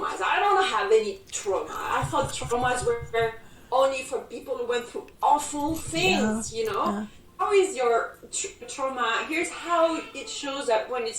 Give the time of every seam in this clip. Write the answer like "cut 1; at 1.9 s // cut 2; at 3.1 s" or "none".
cut 1; at 7.2 s